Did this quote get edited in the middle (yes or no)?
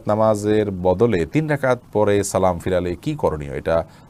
no